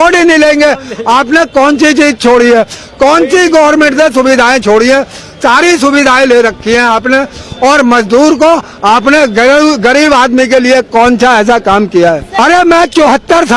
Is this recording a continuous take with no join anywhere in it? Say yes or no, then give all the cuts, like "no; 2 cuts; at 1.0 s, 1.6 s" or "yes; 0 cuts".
no; 1 cut; at 12.3 s